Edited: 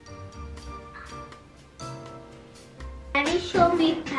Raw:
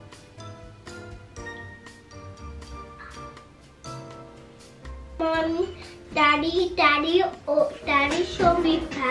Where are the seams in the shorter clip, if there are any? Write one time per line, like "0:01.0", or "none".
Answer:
0:03.1